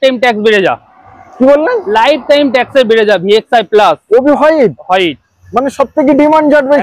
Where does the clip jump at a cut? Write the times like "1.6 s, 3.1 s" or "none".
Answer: none

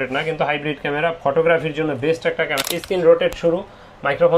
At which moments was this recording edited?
2.6 s

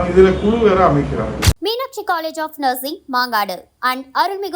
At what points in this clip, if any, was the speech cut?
1.5 s

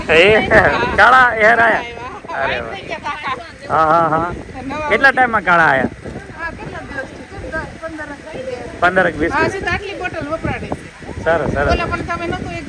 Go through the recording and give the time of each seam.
none

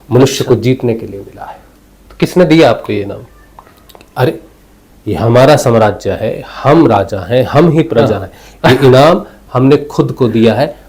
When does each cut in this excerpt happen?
none

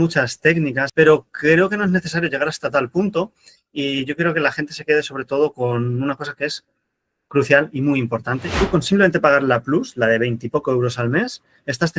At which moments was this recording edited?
0.8 s, 8.5 s

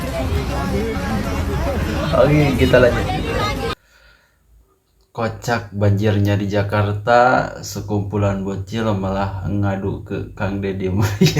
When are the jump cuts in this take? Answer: 3.7 s

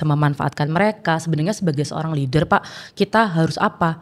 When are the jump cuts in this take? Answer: none

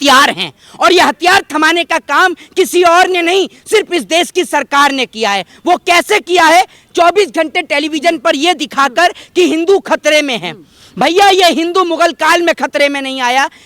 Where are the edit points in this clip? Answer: none

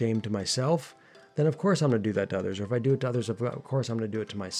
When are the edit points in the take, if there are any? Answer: none

